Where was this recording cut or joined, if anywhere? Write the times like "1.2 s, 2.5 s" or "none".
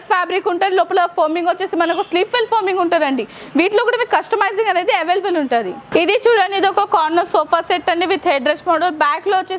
none